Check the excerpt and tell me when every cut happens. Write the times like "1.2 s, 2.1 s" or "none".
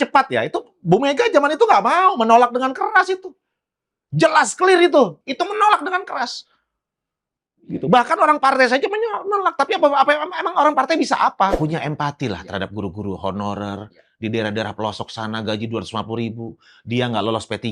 5.2 s, 11.6 s